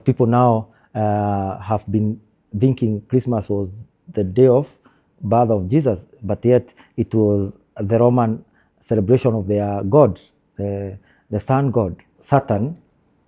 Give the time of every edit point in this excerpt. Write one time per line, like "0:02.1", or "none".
0:12.1